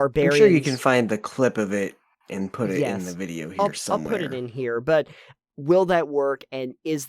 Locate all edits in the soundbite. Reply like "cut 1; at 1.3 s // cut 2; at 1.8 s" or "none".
cut 1; at 5.3 s

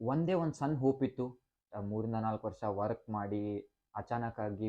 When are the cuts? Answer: cut 1; at 1.7 s

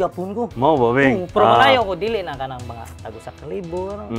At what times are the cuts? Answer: cut 1; at 1.3 s

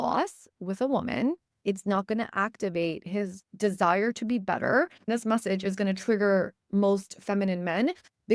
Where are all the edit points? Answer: cut 1; at 1.5 s // cut 2; at 3.4 s // cut 3; at 5.0 s

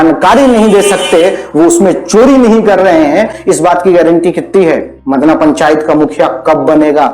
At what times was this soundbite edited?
cut 1; at 3.4 s // cut 2; at 4.9 s

